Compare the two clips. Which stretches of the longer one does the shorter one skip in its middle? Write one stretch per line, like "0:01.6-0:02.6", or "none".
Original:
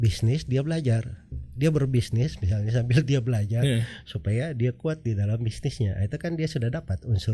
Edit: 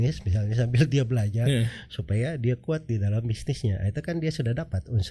none